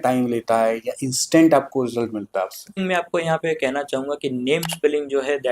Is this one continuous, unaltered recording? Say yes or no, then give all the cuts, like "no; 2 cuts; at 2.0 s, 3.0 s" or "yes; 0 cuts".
no; 1 cut; at 2.8 s